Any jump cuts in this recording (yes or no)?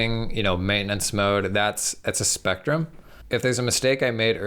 yes